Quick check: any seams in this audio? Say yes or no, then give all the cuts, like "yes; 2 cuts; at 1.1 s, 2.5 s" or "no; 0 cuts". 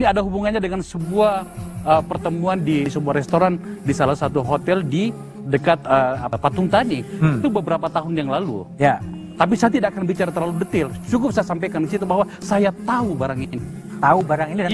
yes; 2 cuts; at 2.9 s, 6.4 s